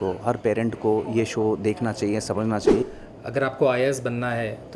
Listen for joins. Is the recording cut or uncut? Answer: cut